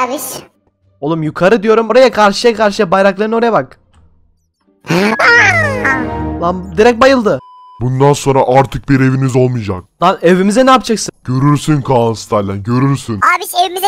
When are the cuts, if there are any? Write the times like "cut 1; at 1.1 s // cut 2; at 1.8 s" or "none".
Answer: cut 1; at 1.9 s // cut 2; at 7.7 s